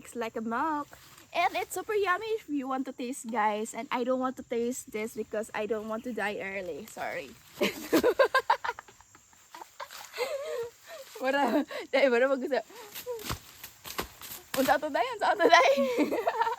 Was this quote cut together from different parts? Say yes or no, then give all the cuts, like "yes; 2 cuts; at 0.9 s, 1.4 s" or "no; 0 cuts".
yes; 1 cut; at 7.6 s